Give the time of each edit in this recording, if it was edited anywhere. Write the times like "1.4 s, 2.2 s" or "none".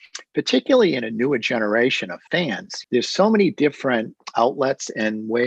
2.6 s

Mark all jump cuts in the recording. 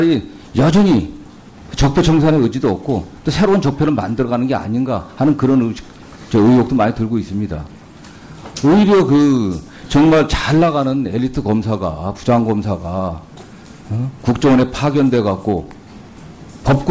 5.9 s

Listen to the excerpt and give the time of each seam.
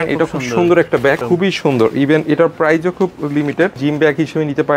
1.2 s, 3.8 s

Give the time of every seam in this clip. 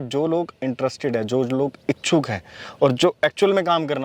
none

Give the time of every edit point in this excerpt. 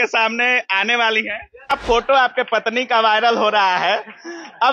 1.7 s

